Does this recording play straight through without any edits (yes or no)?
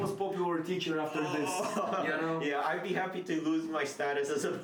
yes